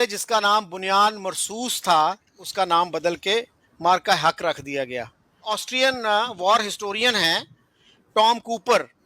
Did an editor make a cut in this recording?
yes; 2 cuts; at 2.4 s, 5.4 s

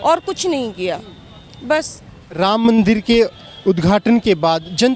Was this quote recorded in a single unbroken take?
yes; 0 cuts

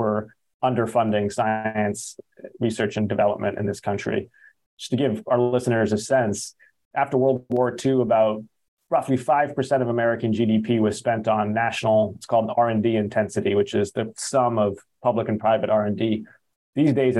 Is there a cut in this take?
no; 0 cuts

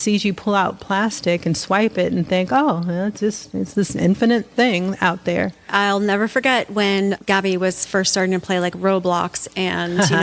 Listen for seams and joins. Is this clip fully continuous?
no; 2 cuts; at 5.7 s, 7.2 s

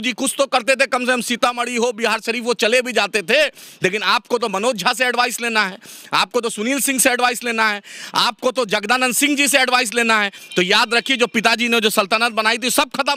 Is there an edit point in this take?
no; 0 cuts

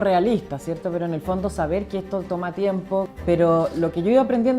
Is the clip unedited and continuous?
no; 1 cut; at 3.1 s

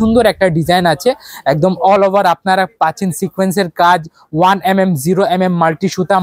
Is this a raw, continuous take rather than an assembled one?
yes; 0 cuts

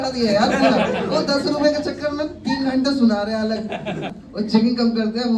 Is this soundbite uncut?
no; 1 cut; at 4.2 s

